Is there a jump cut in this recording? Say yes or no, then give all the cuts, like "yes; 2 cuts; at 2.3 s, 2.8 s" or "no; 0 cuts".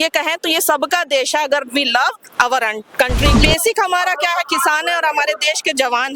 yes; 1 cut; at 3.3 s